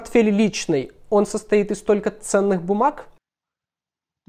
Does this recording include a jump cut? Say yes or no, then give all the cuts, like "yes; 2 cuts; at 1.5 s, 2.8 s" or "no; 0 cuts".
no; 0 cuts